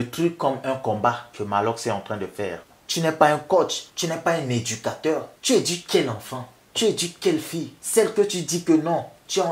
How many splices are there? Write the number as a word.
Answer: one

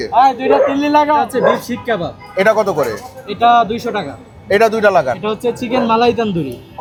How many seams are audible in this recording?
zero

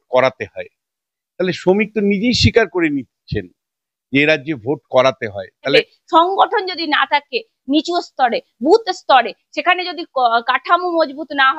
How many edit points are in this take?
one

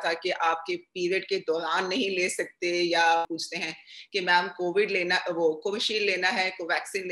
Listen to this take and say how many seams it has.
one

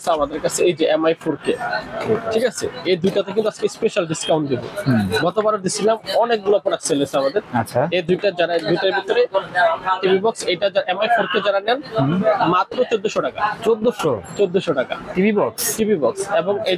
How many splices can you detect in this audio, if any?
zero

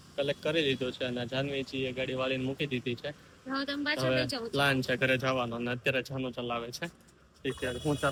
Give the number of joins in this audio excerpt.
zero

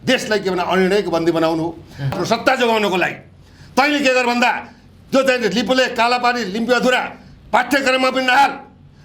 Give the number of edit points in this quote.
one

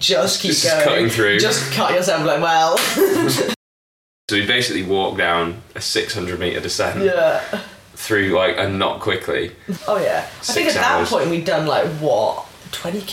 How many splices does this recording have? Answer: two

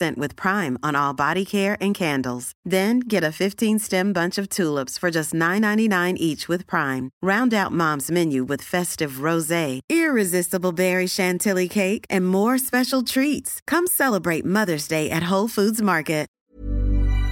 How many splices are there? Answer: one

